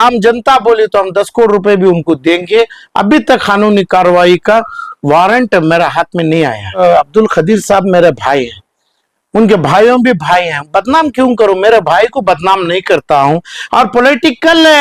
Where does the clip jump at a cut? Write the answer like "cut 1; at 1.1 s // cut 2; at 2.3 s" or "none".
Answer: cut 1; at 6.8 s